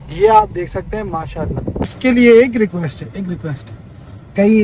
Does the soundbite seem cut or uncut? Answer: cut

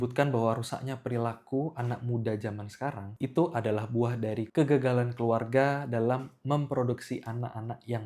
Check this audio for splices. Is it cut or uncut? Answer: uncut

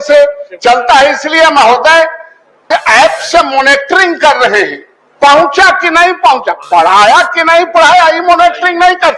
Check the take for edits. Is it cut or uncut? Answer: cut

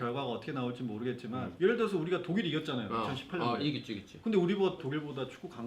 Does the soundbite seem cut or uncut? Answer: cut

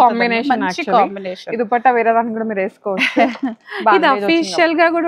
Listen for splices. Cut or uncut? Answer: uncut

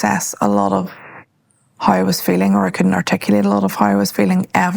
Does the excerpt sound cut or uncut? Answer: uncut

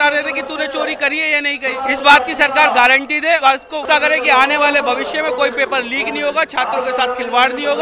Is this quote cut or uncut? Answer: cut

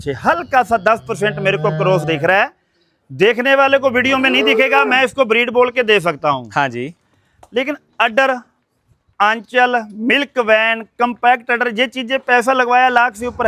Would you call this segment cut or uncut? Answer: uncut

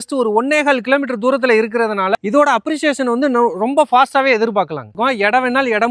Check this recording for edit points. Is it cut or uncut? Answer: cut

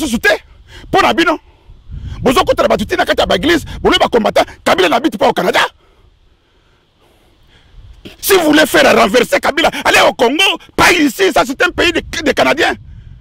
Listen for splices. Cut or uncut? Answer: uncut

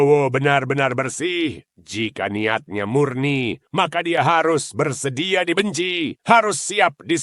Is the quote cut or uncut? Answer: uncut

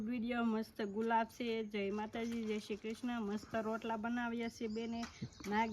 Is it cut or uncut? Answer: uncut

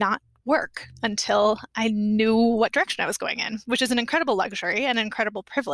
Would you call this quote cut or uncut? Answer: uncut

